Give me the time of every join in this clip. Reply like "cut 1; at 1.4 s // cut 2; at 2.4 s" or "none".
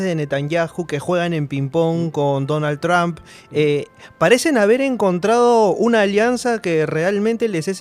none